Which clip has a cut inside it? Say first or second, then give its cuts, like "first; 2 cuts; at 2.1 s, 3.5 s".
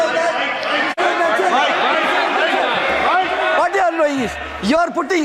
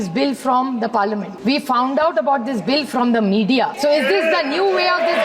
second; 2 cuts; at 1.3 s, 3.7 s